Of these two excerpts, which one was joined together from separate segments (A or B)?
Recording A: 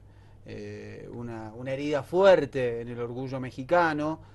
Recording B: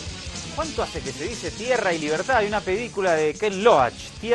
A